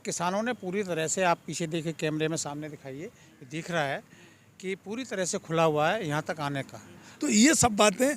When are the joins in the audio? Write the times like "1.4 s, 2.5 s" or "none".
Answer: 7.1 s